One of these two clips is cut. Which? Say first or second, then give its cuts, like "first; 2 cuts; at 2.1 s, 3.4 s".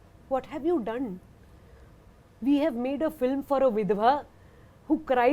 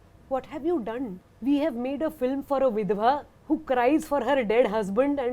second; 2 cuts; at 1.3 s, 3.3 s